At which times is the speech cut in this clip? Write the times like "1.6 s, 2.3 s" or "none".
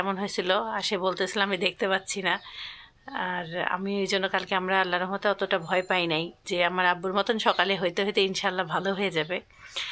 none

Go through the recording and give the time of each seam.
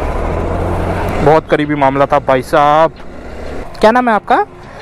3.7 s

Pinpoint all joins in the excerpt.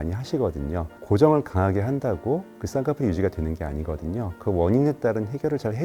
0.9 s

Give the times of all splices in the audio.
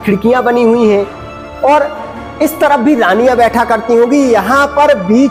none

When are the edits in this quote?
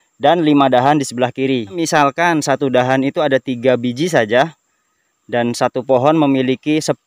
1.8 s

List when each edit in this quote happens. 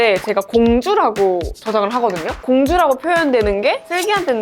2.3 s

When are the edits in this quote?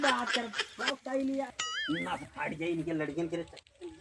1.5 s

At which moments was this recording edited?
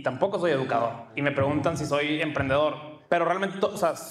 1.1 s, 2.9 s

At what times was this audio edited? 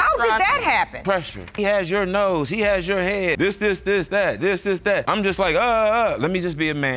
1.5 s, 3.4 s, 5.1 s

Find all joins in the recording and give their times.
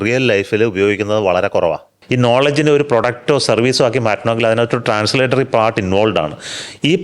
1.9 s

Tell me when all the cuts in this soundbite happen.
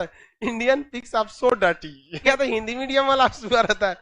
2.2 s

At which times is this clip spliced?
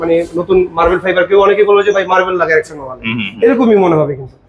none

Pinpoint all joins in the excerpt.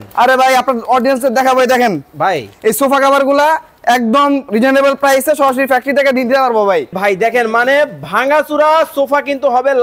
7.0 s

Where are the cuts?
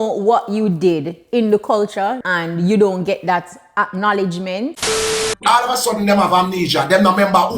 2.2 s, 5.1 s

